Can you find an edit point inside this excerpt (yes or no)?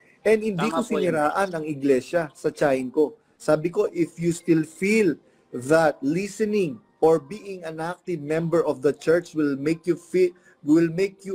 no